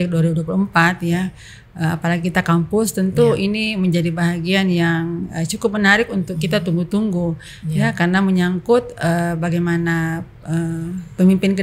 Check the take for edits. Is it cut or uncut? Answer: uncut